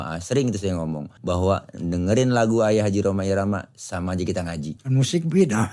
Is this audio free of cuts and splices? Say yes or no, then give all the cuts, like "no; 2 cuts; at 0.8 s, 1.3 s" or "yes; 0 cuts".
no; 2 cuts; at 1.1 s, 4.8 s